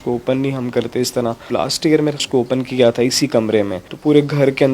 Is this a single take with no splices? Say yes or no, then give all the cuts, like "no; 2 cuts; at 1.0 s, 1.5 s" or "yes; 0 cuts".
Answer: no; 2 cuts; at 1.5 s, 3.8 s